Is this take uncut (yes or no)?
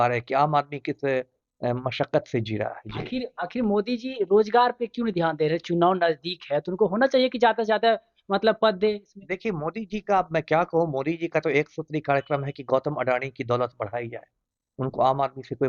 yes